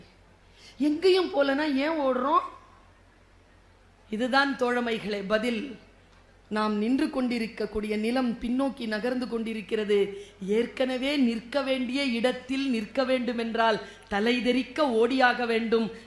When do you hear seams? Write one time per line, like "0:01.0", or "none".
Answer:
none